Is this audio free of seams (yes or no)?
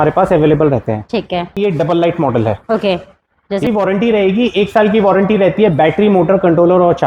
no